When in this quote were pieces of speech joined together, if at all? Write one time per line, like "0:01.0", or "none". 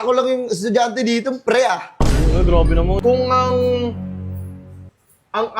0:03.0